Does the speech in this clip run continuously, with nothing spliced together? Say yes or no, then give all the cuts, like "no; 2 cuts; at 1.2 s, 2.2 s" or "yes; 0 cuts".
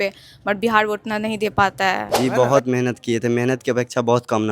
no; 1 cut; at 2.1 s